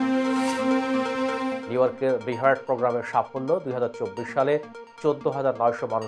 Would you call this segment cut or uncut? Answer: cut